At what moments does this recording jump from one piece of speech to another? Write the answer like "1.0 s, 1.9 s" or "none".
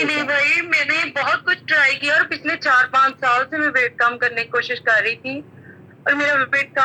none